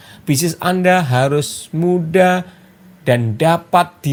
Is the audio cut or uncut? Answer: uncut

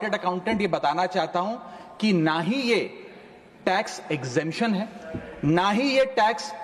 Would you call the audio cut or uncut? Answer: uncut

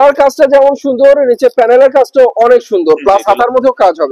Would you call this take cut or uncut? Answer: uncut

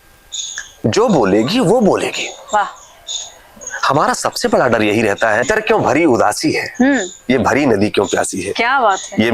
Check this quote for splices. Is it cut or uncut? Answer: cut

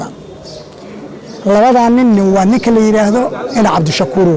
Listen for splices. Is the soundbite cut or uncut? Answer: uncut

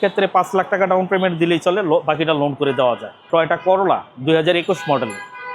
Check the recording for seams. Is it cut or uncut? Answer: uncut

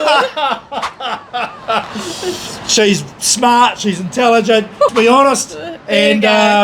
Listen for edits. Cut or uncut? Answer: cut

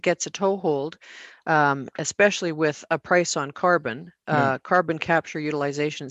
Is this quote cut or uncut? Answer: uncut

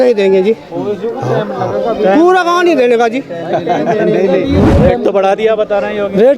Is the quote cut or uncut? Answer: cut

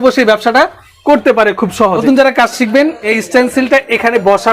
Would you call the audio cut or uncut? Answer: cut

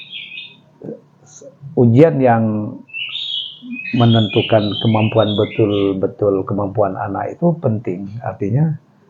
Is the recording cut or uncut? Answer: uncut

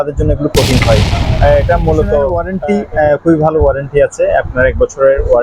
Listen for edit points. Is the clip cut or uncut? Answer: cut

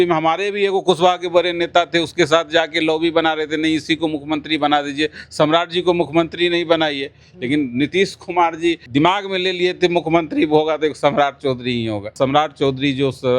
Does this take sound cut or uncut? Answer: cut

